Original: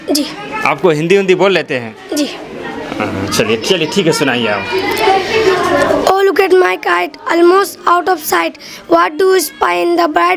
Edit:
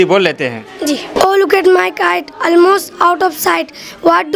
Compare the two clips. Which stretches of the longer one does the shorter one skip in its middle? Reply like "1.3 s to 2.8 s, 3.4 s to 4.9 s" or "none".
2.4 s to 6.0 s